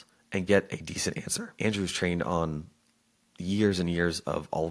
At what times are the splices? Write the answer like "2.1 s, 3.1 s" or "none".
1.5 s